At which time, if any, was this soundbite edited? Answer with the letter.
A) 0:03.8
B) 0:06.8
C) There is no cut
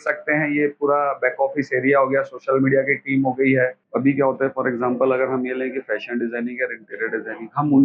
A